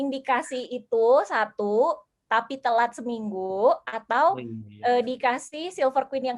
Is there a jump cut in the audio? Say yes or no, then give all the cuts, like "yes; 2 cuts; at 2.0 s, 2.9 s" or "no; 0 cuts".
no; 0 cuts